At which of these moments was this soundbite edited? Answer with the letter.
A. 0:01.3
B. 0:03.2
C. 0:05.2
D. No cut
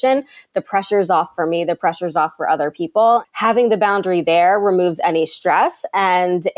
B